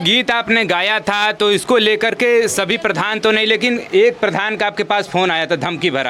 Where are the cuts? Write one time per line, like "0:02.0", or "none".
none

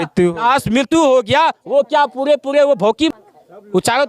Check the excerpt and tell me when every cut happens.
0:03.1

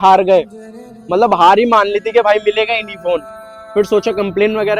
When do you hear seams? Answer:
none

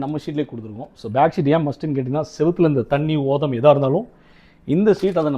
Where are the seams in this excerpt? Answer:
none

